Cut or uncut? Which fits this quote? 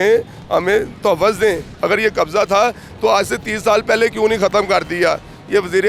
cut